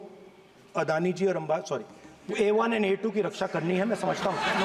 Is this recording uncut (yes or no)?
yes